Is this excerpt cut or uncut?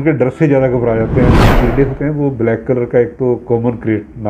cut